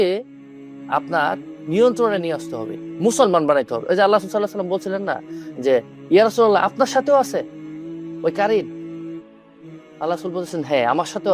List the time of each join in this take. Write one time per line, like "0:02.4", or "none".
none

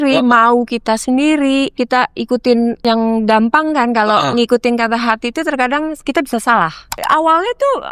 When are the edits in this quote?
0:01.8
0:02.8
0:06.8

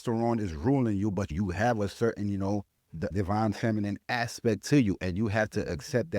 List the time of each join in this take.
0:01.3
0:03.0

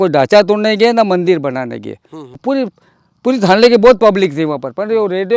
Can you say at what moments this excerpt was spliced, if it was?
0:02.4

